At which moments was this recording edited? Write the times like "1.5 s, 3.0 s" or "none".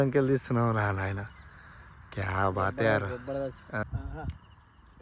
3.8 s